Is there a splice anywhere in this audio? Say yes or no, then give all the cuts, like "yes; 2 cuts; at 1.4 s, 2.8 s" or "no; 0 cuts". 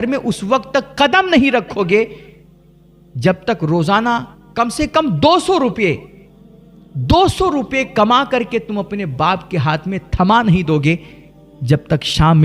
no; 0 cuts